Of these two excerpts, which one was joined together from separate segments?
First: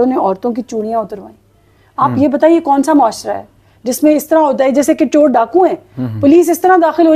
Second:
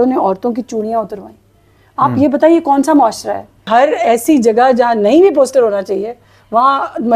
second; 1 cut; at 3.7 s

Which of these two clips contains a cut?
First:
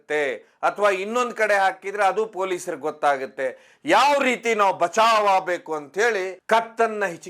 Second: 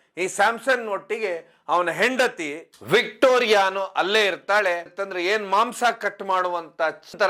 first; 1 cut; at 6.3 s

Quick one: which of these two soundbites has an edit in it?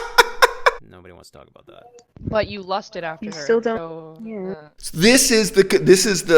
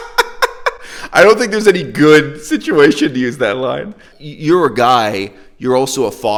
first; 1 cut; at 0.9 s

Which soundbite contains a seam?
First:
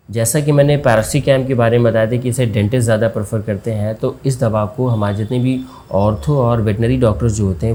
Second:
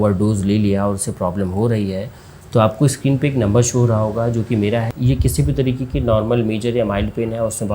second; 1 cut; at 4.9 s

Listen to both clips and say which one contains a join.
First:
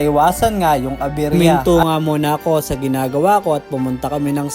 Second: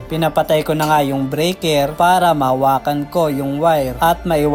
first; 1 cut; at 1.4 s

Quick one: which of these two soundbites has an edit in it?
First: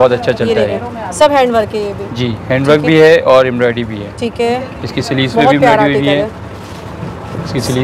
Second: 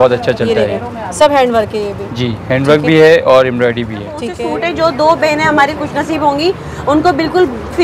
second; 1 cut; at 4.3 s

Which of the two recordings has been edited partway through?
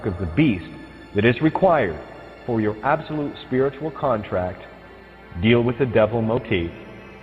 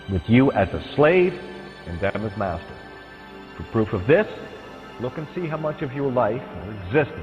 second; 1 cut; at 5.9 s

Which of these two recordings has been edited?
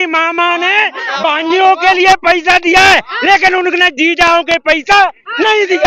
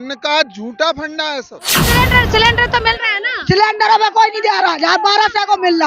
second; 1 cut; at 1.9 s

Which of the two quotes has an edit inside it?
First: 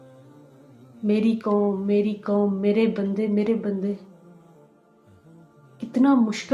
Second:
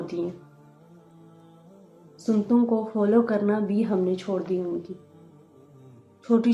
first; 2 cuts; at 4.0 s, 5.3 s

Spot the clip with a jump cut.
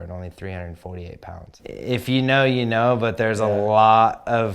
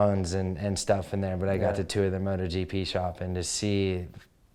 first; 1 cut; at 1.5 s

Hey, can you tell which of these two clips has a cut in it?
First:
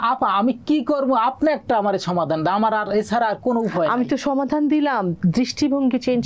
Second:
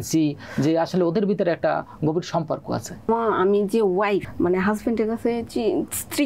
second; 2 cuts; at 3.1 s, 4.3 s

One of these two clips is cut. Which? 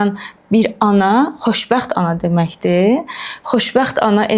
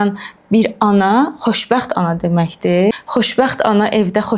second; 1 cut; at 2.9 s

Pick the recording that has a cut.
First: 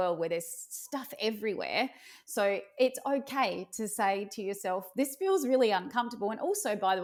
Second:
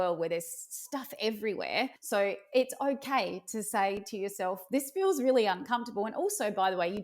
second; 1 cut; at 2.0 s

